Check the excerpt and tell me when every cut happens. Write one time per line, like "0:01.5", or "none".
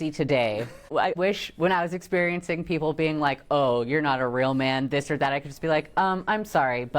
0:01.1